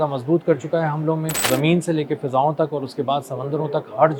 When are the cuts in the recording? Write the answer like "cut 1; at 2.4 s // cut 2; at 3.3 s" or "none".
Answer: cut 1; at 1.4 s